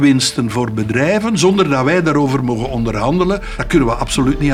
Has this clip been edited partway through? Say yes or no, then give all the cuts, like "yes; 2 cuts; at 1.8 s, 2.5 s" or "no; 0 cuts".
yes; 1 cut; at 3.6 s